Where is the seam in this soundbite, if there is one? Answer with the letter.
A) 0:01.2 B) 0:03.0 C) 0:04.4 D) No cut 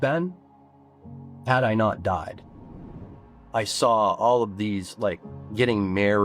B